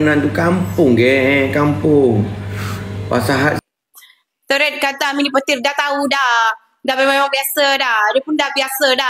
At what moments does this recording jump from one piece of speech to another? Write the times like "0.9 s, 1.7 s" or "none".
3.6 s